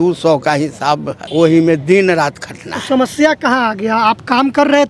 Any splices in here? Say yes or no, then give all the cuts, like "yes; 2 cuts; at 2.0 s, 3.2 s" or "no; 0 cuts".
yes; 1 cut; at 1.2 s